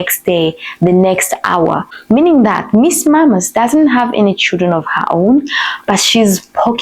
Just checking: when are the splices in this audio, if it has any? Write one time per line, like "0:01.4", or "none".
0:01.9